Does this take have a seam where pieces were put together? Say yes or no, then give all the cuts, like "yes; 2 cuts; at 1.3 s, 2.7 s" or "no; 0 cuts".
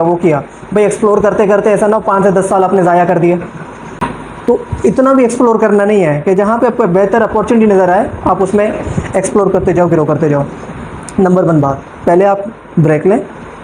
no; 0 cuts